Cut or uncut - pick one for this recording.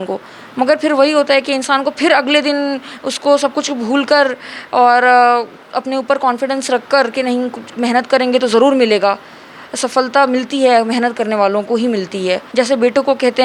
cut